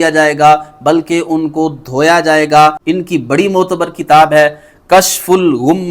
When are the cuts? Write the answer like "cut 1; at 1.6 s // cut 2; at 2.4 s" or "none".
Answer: cut 1; at 2.8 s